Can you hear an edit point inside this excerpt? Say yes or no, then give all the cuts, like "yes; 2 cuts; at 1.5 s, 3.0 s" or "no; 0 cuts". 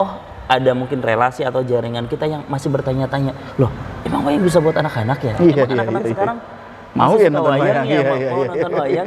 no; 0 cuts